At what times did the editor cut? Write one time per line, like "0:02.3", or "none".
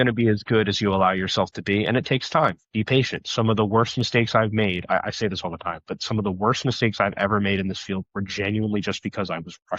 none